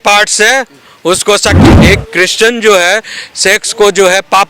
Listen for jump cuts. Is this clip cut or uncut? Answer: cut